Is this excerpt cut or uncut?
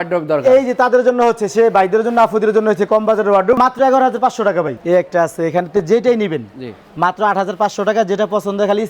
cut